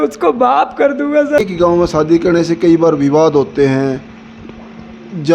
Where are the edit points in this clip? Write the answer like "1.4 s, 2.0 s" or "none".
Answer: 1.4 s